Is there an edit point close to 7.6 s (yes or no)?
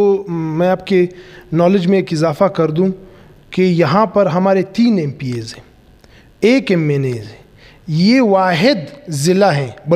no